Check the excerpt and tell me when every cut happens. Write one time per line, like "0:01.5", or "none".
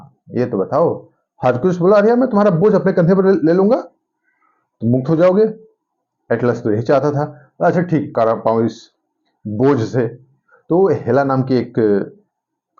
0:08.1